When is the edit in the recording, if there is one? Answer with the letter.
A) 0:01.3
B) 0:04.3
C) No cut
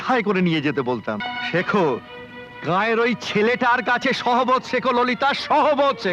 A